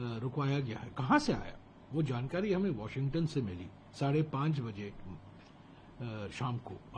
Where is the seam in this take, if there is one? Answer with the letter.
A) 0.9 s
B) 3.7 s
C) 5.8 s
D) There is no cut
D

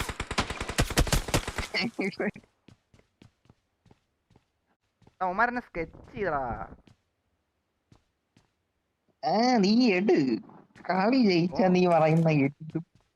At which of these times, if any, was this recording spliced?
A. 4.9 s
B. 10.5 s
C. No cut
A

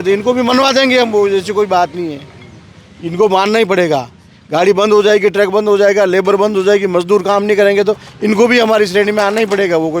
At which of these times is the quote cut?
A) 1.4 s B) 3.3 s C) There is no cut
C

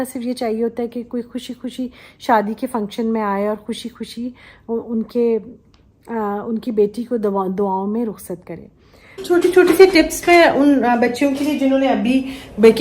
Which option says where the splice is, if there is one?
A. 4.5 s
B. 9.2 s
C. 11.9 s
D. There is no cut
B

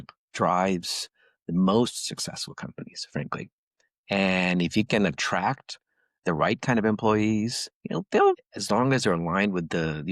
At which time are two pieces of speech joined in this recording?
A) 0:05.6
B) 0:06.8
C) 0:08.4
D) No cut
C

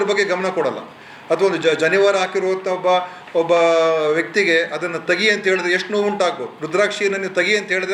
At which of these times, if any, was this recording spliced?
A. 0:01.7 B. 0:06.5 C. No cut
B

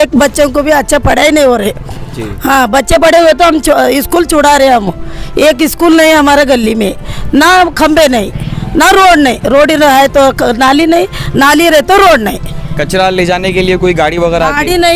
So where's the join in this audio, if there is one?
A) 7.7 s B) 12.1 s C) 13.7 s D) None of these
D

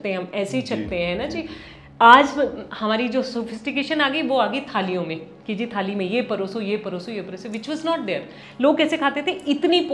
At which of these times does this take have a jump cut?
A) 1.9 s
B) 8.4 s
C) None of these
B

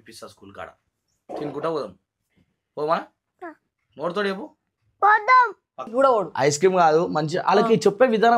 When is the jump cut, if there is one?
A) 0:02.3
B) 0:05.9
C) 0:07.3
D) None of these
B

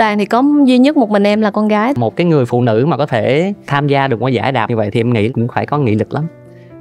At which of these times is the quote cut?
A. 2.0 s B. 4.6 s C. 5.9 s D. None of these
A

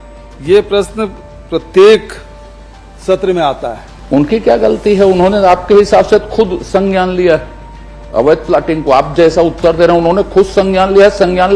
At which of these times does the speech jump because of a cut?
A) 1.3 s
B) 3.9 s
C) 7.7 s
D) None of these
B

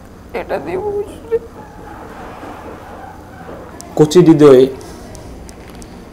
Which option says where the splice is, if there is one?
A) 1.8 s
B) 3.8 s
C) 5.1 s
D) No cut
B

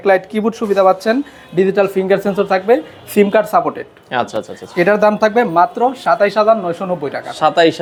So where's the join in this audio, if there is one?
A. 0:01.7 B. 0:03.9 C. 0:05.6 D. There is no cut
D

